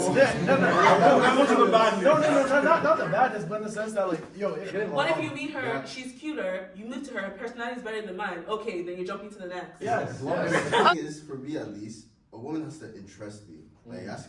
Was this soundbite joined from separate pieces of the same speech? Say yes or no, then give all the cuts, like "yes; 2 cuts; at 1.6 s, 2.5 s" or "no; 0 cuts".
yes; 2 cuts; at 4.7 s, 10.9 s